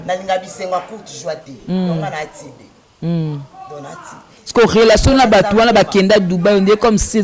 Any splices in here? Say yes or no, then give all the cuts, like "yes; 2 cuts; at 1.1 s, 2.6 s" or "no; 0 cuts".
no; 0 cuts